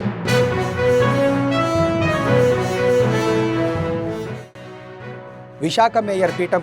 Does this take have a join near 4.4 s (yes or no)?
yes